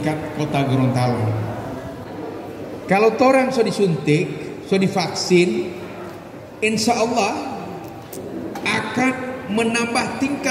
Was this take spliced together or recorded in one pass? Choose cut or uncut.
cut